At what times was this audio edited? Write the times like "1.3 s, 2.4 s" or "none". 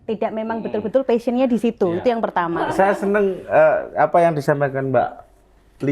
3.0 s